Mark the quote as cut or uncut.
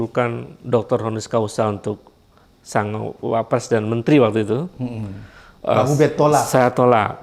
uncut